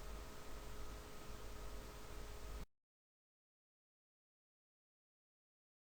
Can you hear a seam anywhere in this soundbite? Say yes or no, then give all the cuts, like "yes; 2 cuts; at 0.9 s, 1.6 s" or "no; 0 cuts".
no; 0 cuts